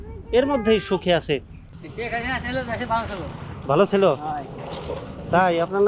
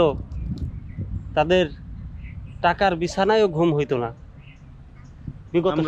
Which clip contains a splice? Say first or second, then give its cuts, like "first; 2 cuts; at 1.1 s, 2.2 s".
first; 1 cut; at 1.6 s